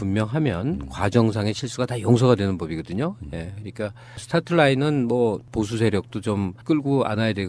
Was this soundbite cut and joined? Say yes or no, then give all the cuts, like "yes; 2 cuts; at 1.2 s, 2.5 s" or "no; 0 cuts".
yes; 1 cut; at 3.3 s